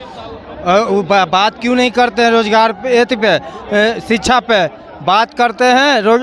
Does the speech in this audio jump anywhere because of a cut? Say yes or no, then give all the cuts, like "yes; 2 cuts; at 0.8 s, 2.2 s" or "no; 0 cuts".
no; 0 cuts